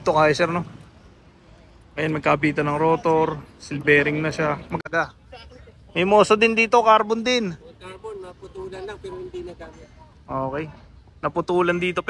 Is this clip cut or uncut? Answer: cut